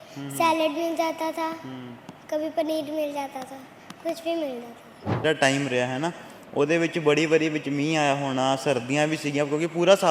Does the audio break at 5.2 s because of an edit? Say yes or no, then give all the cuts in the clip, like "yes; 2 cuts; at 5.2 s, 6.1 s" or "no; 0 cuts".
yes; 1 cut; at 5.2 s